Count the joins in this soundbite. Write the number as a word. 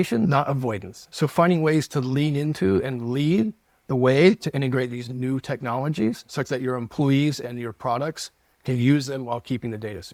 zero